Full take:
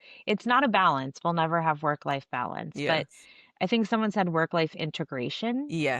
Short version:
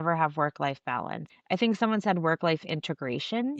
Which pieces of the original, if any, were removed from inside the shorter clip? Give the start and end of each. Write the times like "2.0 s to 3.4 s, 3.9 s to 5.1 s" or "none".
2.7 s to 3.3 s